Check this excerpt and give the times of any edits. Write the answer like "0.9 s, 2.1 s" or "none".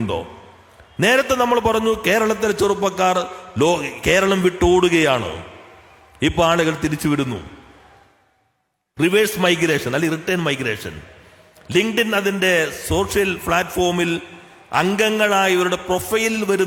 none

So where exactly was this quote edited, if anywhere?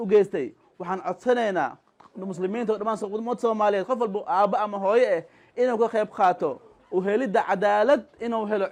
none

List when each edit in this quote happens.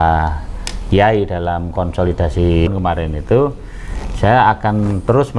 2.7 s

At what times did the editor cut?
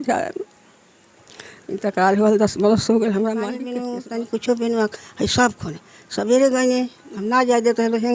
3.7 s

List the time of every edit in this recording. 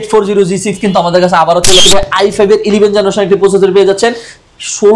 1.8 s

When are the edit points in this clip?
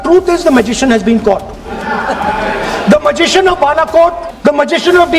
1.6 s, 4.3 s

